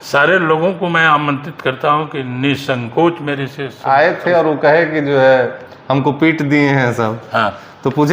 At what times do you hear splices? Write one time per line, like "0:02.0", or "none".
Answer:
0:03.7